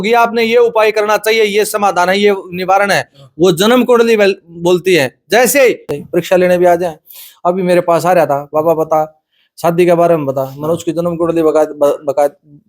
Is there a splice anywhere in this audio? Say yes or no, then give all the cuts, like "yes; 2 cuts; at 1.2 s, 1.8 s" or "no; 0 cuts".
yes; 1 cut; at 6.0 s